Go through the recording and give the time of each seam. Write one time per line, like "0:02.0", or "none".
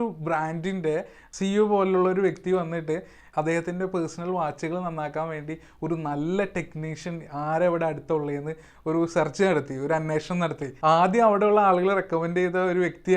0:01.2
0:03.2
0:10.7